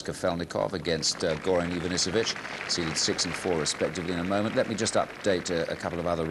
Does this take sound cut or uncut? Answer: uncut